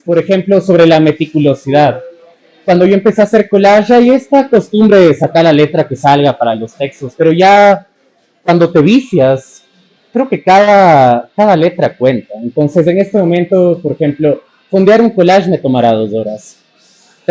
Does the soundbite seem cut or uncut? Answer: uncut